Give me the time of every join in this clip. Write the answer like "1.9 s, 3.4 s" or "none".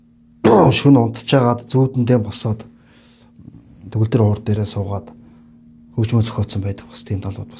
none

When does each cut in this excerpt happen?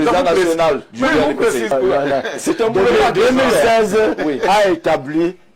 1.7 s

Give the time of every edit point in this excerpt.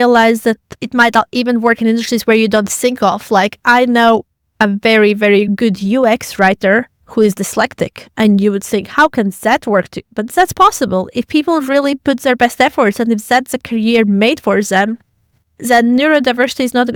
none

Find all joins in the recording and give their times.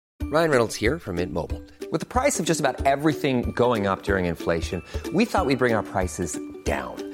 none

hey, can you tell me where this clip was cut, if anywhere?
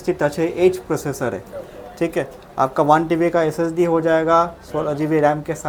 none

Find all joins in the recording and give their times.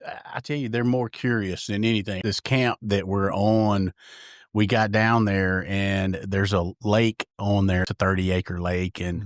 2.1 s, 7.9 s

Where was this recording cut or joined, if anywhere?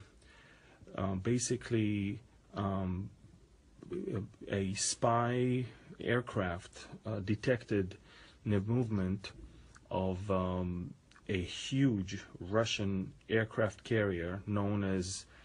3.5 s

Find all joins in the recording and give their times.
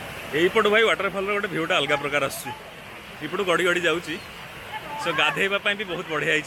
none

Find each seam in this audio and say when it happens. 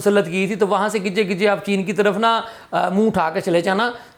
none

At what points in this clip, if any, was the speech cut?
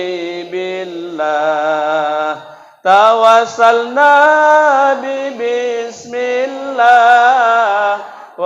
none

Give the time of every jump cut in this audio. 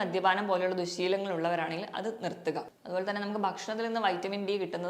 2.7 s

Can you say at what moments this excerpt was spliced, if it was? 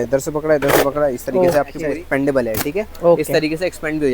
1.8 s

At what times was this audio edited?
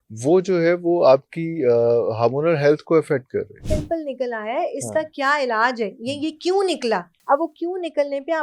3.6 s, 7.1 s

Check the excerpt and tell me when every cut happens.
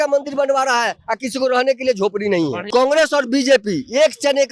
2.6 s

